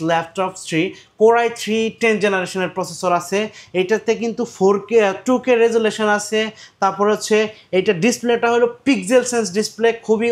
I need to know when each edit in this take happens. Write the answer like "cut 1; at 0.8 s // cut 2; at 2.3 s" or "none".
none